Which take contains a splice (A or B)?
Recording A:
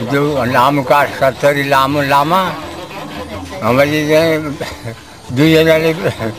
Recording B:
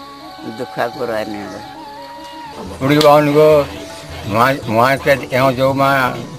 B